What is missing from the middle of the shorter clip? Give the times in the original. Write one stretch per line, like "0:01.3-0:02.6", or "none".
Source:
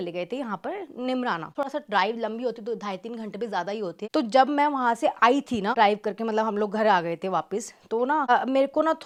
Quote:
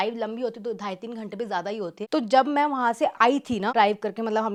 none